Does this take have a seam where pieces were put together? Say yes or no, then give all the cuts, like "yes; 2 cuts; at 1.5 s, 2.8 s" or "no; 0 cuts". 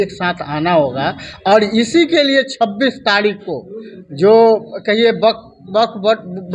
no; 0 cuts